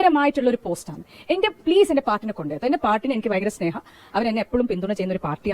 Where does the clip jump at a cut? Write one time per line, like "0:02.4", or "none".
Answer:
none